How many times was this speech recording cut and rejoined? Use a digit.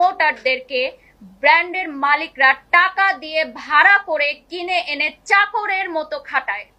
0